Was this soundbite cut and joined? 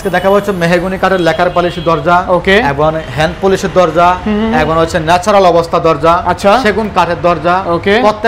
no; 0 cuts

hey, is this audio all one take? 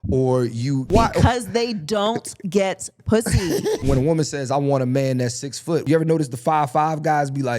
no; 3 cuts; at 0.9 s, 3.8 s, 5.8 s

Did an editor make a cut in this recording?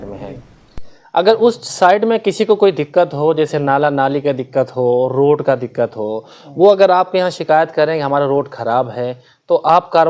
no; 0 cuts

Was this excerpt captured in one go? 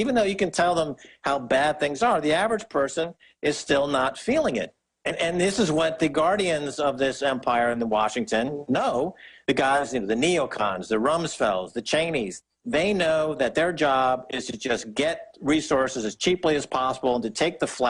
yes; 0 cuts

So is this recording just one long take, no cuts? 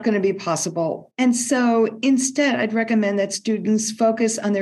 no; 1 cut; at 1.0 s

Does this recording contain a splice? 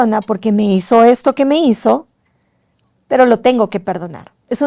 no; 0 cuts

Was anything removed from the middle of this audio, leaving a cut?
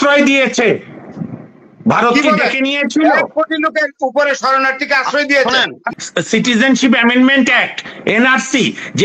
yes; 1 cut; at 5.9 s

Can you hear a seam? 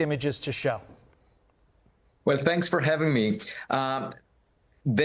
yes; 1 cut; at 3.1 s

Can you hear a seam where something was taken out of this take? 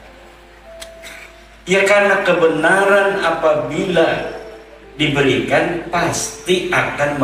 no; 0 cuts

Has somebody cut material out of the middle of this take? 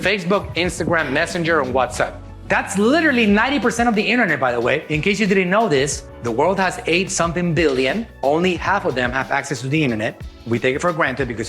no; 0 cuts

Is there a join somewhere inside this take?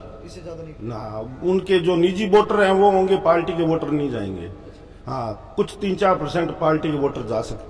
no; 0 cuts

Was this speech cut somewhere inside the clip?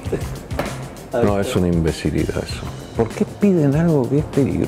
yes; 1 cut; at 2.8 s

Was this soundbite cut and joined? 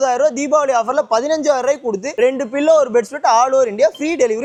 no; 0 cuts

